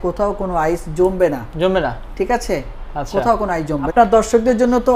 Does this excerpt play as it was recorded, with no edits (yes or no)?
no